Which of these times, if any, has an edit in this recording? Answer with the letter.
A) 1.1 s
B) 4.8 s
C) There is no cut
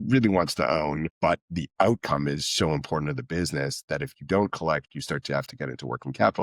A